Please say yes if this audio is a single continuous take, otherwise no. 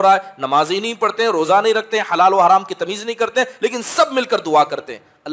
yes